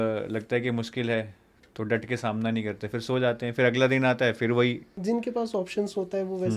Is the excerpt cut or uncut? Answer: cut